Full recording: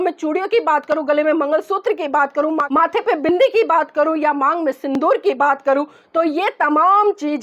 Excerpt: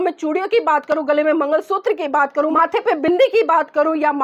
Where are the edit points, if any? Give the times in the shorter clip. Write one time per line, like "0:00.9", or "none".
0:02.5